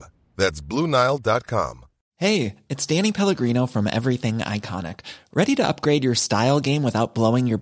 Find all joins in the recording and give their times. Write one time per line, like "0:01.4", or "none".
0:02.0